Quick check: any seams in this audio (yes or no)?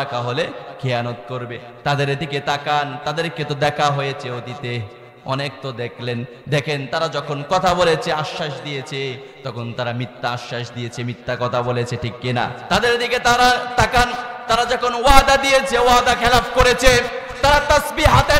yes